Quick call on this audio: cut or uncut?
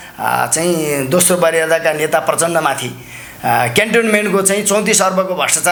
uncut